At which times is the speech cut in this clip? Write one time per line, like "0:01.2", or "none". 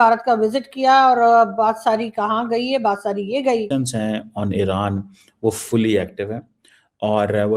0:03.7